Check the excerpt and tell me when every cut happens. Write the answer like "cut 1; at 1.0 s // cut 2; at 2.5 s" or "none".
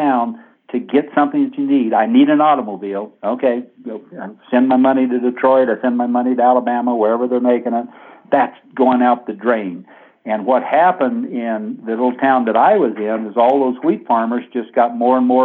cut 1; at 8.2 s